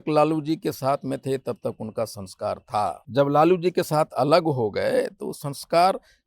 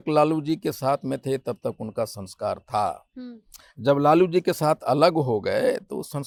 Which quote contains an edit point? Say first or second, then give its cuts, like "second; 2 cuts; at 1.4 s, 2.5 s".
first; 1 cut; at 3.0 s